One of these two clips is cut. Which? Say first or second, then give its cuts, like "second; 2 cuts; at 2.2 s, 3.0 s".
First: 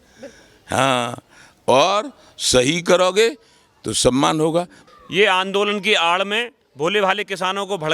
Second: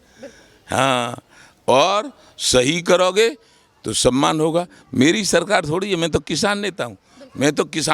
first; 1 cut; at 4.8 s